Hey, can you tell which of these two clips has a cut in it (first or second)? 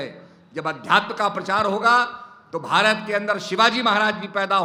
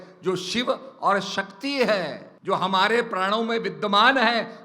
second